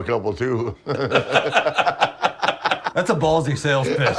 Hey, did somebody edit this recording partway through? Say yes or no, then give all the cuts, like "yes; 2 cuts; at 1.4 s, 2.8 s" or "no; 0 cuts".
yes; 1 cut; at 2.8 s